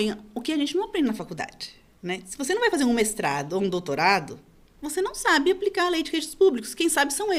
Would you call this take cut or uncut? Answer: uncut